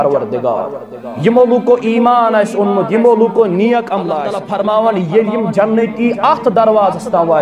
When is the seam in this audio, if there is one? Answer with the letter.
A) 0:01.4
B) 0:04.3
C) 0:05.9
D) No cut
B